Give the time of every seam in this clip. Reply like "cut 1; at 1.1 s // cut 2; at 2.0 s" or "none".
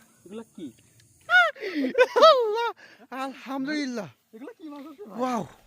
cut 1; at 1.3 s